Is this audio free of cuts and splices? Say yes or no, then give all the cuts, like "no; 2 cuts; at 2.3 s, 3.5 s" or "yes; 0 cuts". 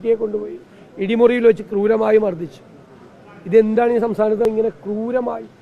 no; 1 cut; at 4.4 s